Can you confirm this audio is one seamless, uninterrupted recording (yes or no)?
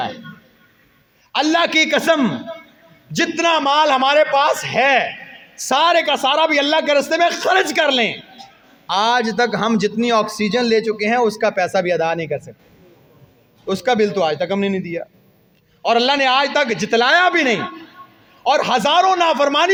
yes